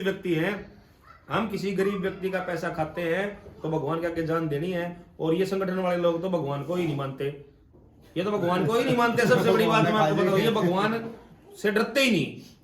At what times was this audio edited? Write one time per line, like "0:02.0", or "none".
none

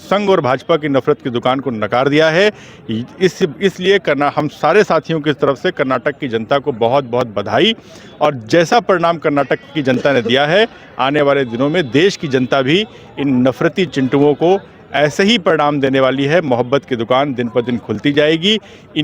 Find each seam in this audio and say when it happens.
none

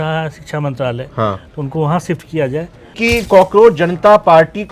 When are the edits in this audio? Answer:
0:02.9

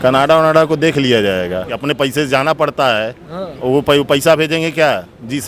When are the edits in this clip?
0:01.7

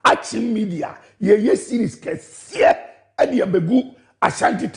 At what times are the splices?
0:01.8

